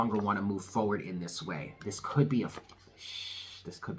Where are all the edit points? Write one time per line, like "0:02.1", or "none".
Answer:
none